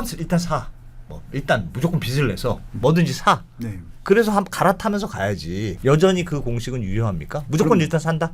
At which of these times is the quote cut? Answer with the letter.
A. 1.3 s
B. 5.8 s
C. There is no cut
B